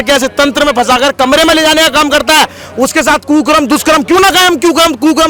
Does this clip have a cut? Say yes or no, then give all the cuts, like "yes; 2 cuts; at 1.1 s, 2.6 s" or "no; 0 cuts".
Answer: no; 0 cuts